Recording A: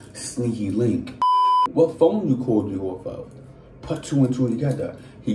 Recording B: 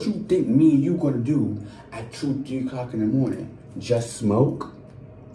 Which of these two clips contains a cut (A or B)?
A